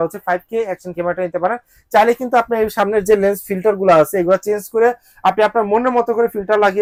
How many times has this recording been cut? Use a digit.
0